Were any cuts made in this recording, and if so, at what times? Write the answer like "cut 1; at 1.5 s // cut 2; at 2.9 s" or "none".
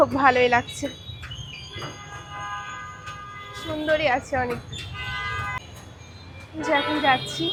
none